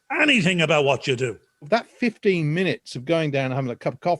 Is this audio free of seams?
no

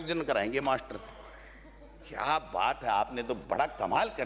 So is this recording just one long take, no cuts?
yes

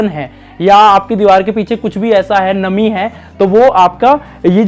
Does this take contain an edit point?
no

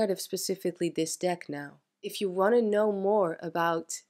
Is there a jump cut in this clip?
yes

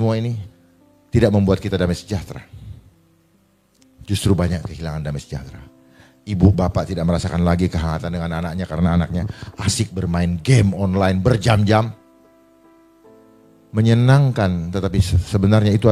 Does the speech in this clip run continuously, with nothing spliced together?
yes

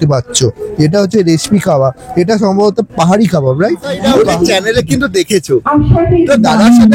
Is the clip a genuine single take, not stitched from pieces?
no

